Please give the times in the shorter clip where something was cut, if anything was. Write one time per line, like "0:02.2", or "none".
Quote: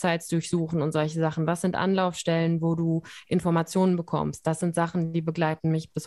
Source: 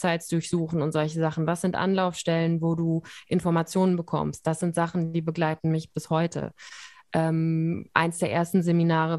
none